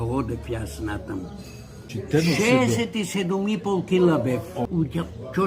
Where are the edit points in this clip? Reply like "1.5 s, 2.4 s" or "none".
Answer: 1.8 s, 4.6 s